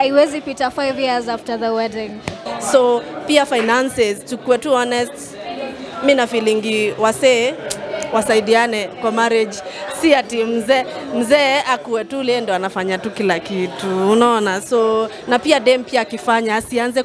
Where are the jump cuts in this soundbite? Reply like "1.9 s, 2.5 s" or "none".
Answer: 2.4 s